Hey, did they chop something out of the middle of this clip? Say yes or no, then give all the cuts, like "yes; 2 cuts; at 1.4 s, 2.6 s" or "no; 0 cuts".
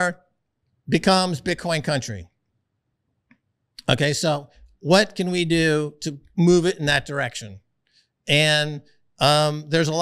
no; 0 cuts